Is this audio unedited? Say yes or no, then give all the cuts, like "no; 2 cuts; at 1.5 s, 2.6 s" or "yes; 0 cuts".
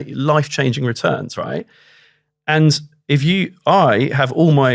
yes; 0 cuts